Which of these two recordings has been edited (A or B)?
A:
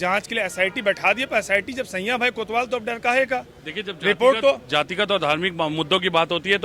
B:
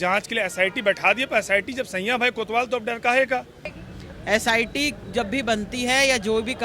B